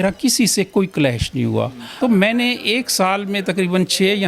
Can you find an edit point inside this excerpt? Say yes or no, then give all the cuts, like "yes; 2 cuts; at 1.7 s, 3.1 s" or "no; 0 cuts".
yes; 1 cut; at 1.8 s